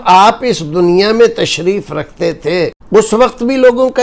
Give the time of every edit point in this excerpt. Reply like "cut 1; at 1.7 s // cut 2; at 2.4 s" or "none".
cut 1; at 3.1 s